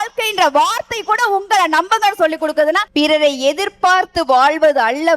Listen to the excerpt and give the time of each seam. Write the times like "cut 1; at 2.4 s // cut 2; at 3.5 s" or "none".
cut 1; at 2.8 s